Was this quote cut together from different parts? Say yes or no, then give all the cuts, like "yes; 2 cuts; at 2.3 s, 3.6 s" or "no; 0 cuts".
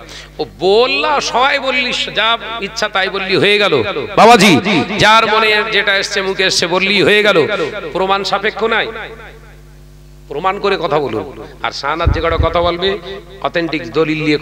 no; 0 cuts